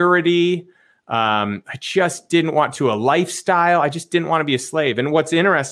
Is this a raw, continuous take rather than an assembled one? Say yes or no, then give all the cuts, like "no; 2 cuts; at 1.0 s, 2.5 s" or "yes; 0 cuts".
yes; 0 cuts